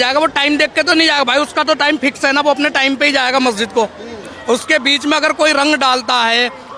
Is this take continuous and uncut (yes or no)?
yes